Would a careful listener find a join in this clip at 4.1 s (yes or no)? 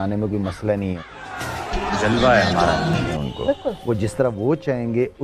no